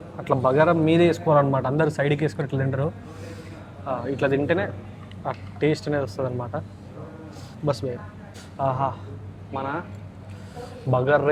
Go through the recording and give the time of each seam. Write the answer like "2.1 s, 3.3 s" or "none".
none